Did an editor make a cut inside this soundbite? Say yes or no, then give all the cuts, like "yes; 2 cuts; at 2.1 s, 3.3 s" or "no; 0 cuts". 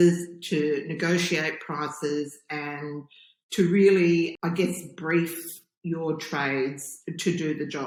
no; 0 cuts